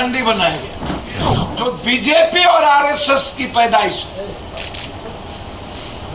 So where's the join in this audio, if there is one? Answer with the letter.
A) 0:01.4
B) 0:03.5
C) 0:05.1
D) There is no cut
A